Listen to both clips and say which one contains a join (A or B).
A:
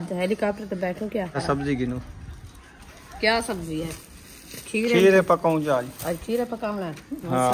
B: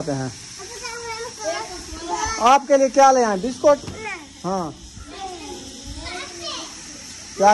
A